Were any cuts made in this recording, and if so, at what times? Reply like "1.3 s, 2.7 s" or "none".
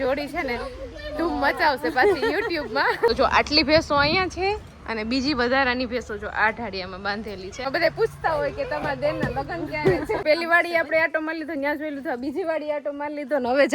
3.1 s, 7.6 s, 10.2 s